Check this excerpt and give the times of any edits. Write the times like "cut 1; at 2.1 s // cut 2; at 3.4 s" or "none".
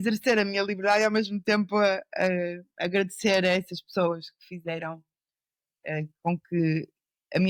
none